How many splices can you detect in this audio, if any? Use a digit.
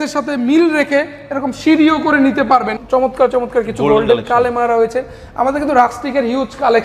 1